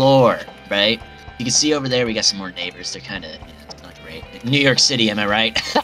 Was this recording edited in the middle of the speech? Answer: yes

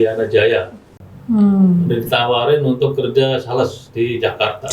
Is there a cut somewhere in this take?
yes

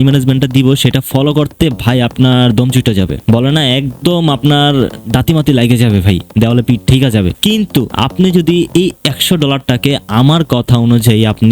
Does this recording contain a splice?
yes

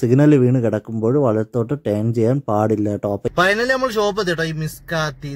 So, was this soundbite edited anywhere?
yes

